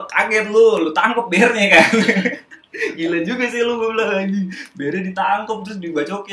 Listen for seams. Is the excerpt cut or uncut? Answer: uncut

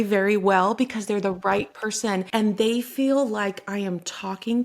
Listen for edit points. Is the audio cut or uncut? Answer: cut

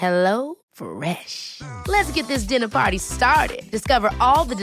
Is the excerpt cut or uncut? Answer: uncut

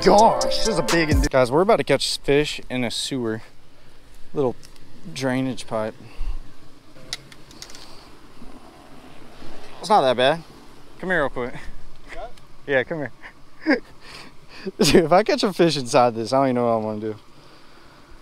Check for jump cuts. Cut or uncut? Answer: cut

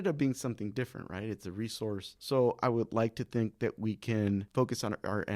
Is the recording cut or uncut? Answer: cut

